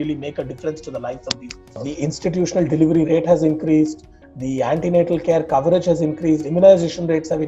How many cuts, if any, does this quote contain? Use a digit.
1